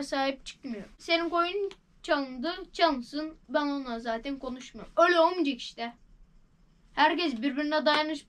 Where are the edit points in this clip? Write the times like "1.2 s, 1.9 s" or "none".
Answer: 1.0 s